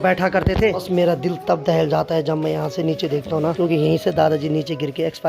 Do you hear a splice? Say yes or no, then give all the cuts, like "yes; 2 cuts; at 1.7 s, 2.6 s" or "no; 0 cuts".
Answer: yes; 2 cuts; at 0.8 s, 3.5 s